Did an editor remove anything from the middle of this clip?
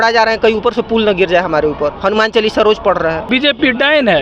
yes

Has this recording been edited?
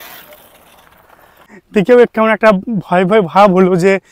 no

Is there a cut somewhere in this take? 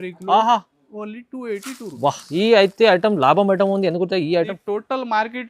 yes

